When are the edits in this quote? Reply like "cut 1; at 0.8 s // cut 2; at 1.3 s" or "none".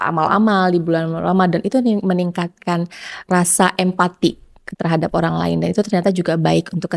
cut 1; at 3.3 s